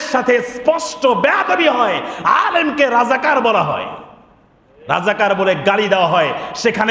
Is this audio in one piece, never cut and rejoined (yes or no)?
yes